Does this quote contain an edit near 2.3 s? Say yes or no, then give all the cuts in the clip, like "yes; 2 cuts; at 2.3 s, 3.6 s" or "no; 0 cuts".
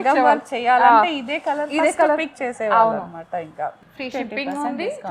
no; 1 cut; at 3.8 s